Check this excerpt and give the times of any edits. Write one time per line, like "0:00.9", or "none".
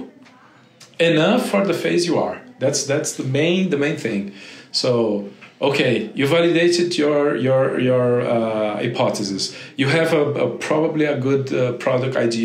none